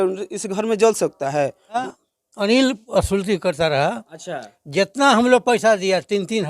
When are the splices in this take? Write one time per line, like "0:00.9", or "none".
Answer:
0:01.9

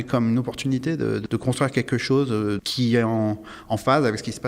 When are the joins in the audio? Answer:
0:01.2
0:02.7

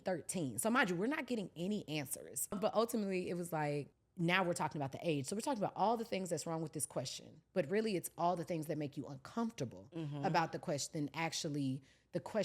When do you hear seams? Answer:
0:02.5
0:04.0

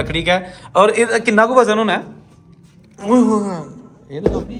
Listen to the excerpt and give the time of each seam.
none

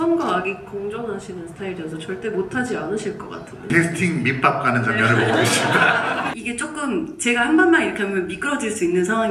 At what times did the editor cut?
0:03.7
0:06.3

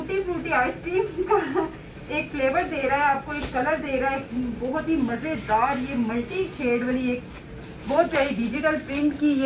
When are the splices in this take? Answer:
none

